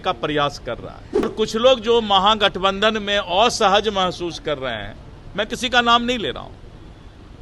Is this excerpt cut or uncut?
cut